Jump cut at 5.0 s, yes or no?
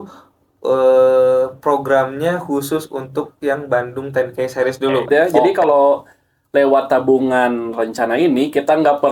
yes